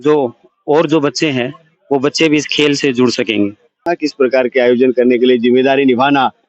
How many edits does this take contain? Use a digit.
1